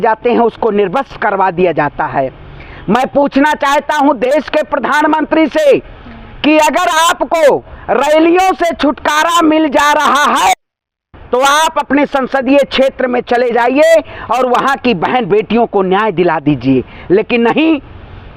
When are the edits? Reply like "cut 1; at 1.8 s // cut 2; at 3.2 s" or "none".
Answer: none